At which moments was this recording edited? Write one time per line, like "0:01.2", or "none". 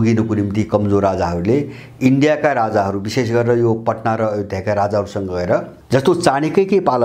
0:05.8